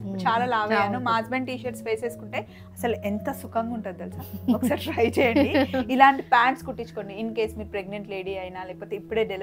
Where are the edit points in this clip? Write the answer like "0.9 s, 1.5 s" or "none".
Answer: none

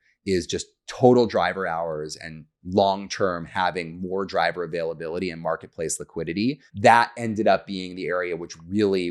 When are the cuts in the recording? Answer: 6.7 s

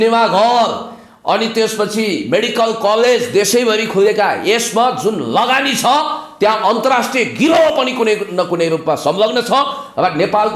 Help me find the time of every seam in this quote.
none

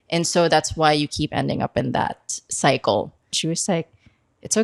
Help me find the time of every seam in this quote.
3.3 s

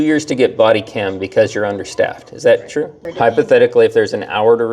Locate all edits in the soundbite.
3.0 s

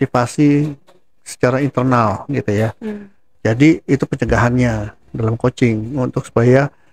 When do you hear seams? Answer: none

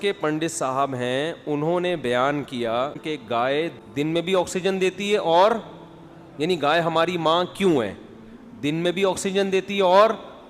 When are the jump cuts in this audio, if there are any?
3.0 s, 3.8 s

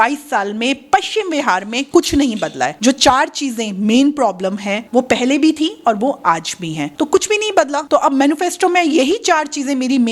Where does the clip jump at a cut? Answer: none

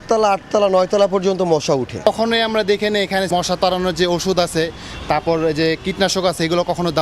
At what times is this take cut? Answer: 2.1 s, 3.3 s

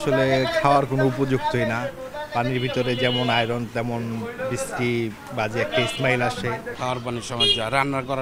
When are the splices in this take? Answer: none

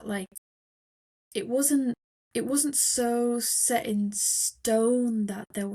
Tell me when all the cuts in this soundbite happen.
2.1 s

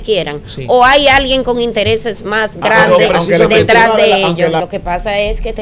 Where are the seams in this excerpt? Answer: 4.6 s

